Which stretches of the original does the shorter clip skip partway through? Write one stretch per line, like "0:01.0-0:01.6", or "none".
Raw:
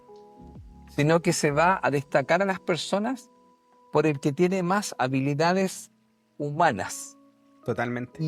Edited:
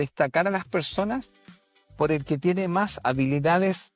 none

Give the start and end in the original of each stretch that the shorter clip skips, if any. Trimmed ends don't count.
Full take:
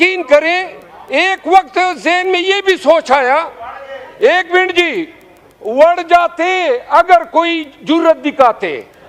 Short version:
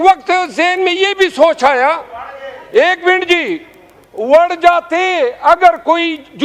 none

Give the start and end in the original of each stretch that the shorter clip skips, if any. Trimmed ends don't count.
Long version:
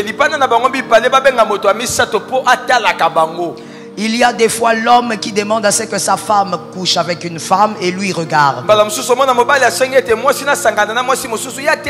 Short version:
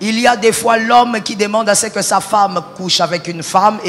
none

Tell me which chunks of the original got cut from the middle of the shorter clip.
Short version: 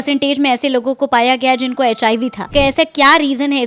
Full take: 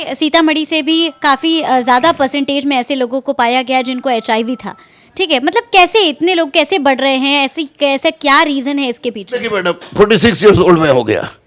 0:04.7-0:07.7

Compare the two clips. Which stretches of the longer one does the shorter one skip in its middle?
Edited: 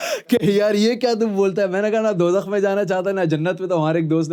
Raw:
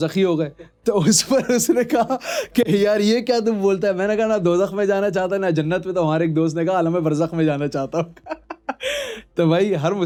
none

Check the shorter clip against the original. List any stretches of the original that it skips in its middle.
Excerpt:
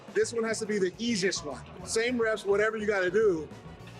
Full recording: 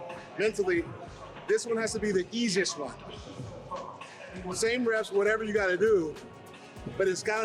0:03.1-0:04.4

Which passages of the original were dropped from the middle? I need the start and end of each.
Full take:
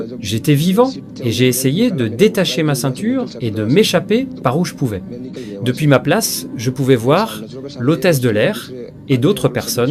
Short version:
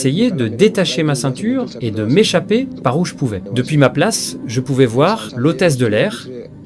0:05.0-0:05.5
0:07.4-0:07.7

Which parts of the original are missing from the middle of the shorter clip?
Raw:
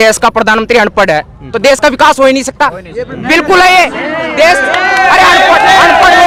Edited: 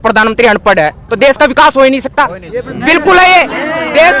0:01.3-0:01.4

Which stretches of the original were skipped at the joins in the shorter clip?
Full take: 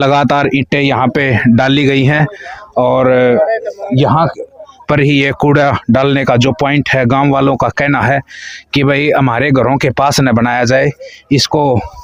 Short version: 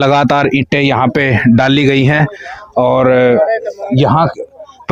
none

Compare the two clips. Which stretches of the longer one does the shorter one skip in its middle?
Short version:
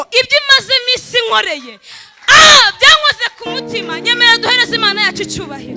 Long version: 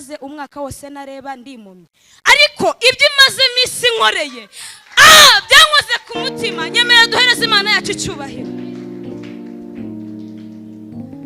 none

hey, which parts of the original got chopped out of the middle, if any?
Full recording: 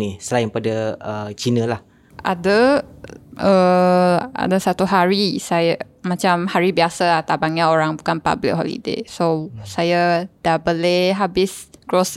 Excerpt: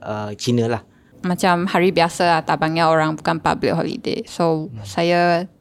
0:02.1-0:05.9

